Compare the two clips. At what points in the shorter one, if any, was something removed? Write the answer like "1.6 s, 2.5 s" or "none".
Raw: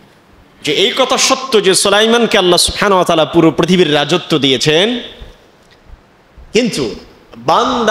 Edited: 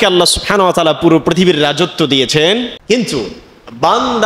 2.8 s